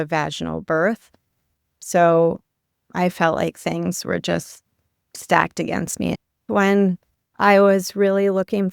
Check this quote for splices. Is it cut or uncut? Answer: cut